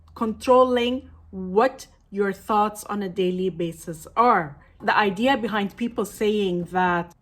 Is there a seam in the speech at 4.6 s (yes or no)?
yes